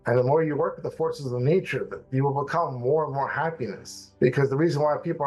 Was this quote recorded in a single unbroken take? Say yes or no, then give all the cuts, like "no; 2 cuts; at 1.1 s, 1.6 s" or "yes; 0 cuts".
yes; 0 cuts